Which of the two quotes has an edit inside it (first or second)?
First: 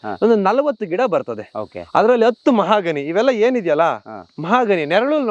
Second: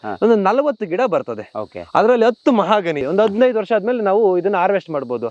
second